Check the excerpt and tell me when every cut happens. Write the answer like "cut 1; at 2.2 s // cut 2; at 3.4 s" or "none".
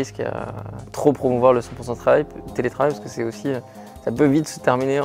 none

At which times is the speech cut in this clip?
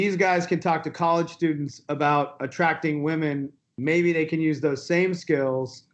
cut 1; at 3.5 s

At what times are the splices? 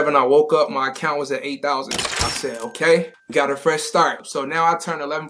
cut 1; at 4.3 s

